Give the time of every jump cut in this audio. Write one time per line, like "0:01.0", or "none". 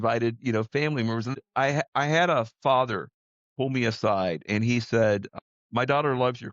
0:01.3